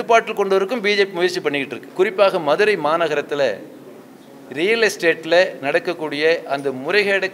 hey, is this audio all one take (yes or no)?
no